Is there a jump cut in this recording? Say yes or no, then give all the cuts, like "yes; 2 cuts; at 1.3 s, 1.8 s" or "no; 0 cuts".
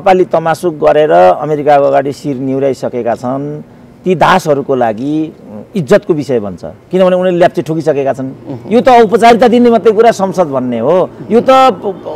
no; 0 cuts